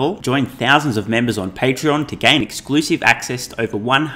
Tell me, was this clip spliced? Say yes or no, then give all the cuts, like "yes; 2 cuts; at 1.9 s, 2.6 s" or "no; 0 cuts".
no; 0 cuts